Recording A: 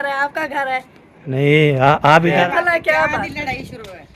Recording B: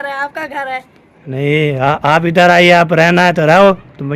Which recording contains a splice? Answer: A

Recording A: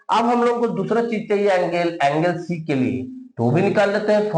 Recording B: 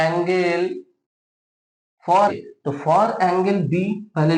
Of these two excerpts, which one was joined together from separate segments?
B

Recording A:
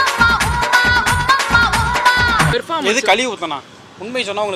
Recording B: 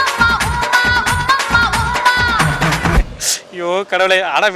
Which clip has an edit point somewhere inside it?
A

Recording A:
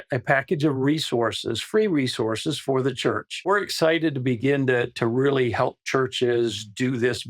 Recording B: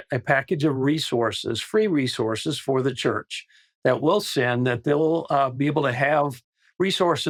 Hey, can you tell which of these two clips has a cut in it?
A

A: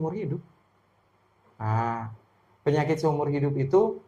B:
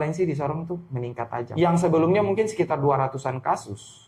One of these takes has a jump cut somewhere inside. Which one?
B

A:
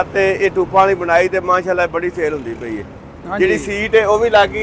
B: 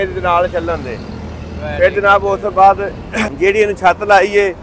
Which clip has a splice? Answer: B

